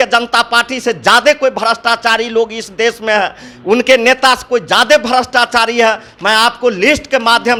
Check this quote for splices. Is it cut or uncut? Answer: uncut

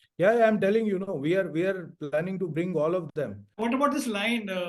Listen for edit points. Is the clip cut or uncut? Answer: cut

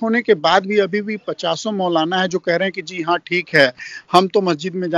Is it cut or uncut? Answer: uncut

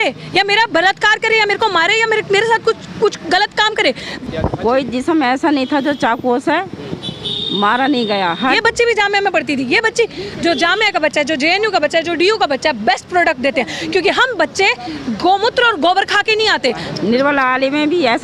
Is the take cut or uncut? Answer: cut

